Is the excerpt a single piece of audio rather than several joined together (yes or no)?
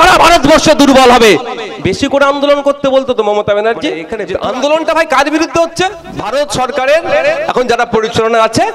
no